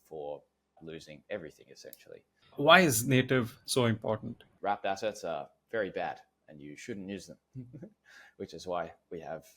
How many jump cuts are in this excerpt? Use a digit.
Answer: 2